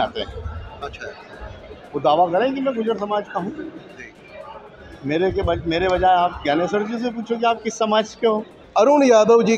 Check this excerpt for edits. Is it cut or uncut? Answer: cut